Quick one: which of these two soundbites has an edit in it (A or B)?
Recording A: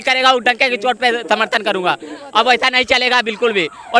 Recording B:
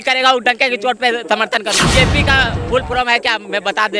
B